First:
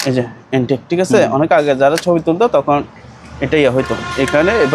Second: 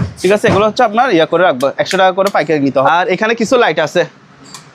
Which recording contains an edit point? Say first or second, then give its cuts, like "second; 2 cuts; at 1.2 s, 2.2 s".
second; 1 cut; at 2.9 s